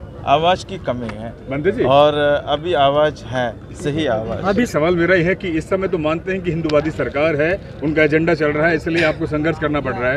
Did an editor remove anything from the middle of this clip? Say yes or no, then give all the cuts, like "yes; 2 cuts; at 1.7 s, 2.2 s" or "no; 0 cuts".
yes; 1 cut; at 4.7 s